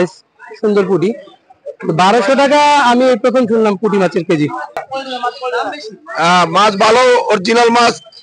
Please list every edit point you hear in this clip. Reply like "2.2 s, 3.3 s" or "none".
4.8 s